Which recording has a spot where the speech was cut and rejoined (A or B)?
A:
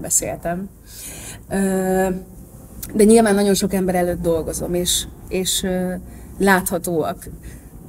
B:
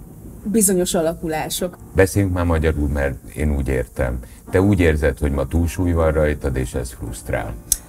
B